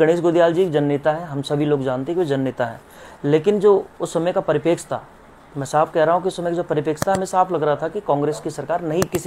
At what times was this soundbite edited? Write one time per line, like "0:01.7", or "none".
none